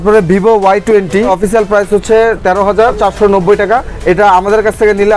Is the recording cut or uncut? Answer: cut